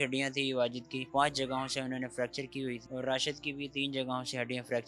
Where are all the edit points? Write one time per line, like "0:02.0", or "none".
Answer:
0:01.0
0:02.8